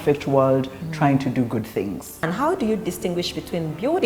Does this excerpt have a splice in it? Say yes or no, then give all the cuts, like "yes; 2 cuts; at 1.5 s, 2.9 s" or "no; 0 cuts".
yes; 1 cut; at 2.2 s